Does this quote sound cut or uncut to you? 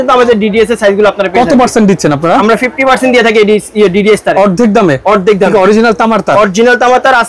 uncut